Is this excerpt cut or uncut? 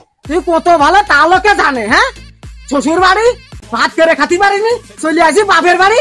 uncut